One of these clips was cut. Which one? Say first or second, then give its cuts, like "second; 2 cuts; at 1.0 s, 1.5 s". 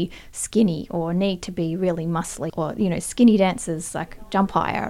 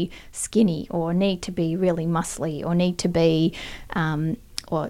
first; 1 cut; at 2.4 s